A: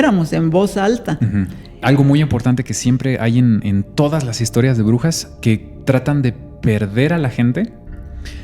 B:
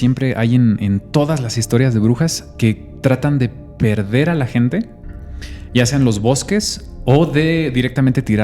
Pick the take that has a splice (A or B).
A